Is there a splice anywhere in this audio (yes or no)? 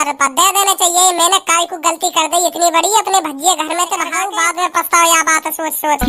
yes